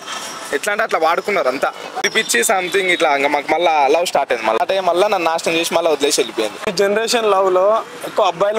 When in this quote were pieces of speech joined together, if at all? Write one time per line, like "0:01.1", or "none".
0:02.1
0:04.6
0:06.7